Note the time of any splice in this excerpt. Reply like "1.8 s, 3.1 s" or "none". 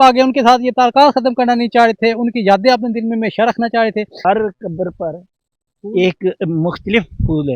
4.1 s